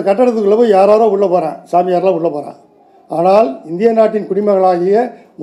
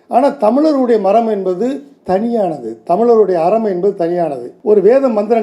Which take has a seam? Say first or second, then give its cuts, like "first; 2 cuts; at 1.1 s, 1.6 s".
second; 1 cut; at 4.5 s